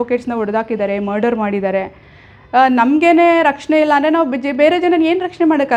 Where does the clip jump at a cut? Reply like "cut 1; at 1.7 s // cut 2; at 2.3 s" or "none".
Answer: none